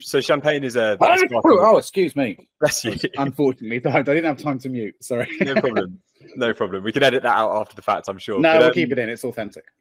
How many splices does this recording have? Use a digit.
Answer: 0